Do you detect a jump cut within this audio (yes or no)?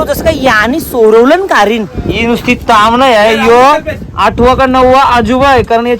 yes